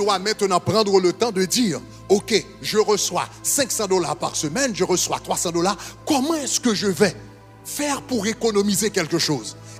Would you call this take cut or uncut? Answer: uncut